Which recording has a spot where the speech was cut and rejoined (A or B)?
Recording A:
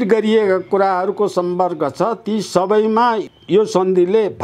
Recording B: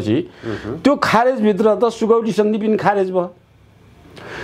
A